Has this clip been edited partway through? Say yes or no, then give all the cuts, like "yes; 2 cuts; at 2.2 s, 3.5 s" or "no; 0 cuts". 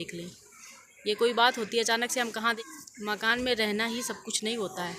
yes; 1 cut; at 2.5 s